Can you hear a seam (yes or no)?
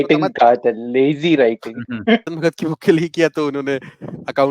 yes